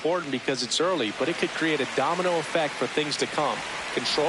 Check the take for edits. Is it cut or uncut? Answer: uncut